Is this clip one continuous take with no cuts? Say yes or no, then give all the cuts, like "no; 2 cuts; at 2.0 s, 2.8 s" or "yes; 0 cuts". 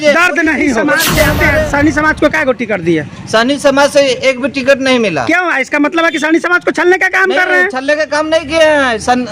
no; 1 cut; at 1.4 s